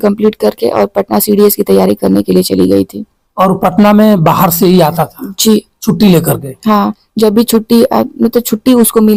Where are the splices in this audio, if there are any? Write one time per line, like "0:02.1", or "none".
none